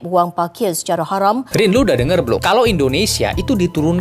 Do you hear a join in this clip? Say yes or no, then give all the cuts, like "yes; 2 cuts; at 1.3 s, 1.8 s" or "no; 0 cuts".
yes; 1 cut; at 1.5 s